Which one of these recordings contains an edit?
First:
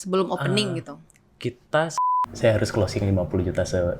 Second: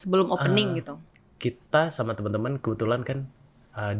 first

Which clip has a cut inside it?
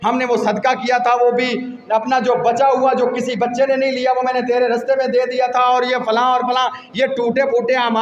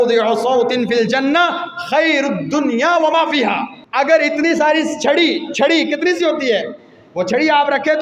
second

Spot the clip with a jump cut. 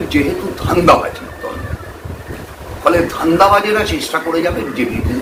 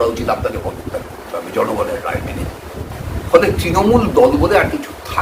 second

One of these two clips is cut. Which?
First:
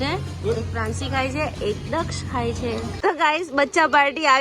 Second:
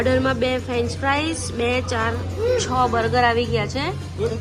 first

